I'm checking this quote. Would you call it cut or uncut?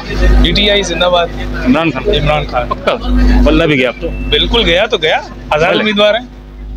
uncut